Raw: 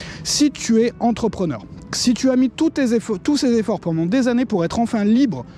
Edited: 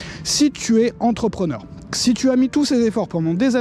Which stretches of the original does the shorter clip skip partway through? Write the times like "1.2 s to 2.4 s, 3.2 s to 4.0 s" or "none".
2.5 s to 3.2 s